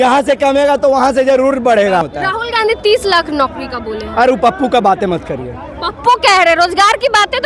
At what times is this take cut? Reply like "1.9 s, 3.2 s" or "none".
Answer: 2.1 s